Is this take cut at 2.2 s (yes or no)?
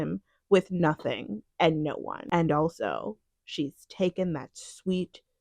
yes